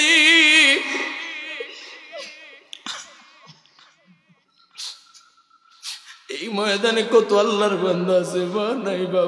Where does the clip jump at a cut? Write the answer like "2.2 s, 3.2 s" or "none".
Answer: 5.1 s